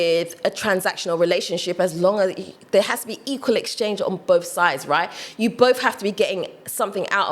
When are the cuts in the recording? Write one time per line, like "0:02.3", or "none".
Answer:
none